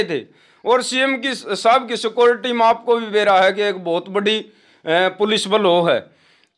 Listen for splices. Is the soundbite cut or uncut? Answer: uncut